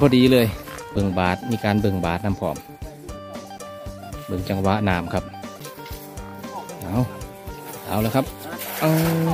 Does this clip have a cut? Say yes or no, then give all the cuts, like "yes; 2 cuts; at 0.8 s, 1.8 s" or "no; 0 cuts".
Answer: yes; 2 cuts; at 1.0 s, 5.6 s